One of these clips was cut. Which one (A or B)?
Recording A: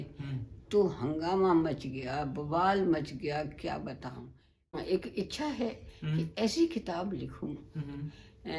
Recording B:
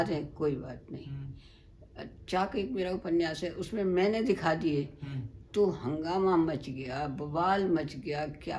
A